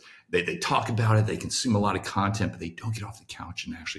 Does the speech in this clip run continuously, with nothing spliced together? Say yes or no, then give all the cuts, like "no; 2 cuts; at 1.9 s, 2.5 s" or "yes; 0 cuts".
yes; 0 cuts